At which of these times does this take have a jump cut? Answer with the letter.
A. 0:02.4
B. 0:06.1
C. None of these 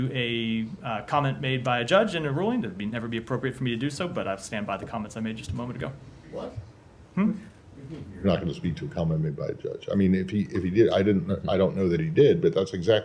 C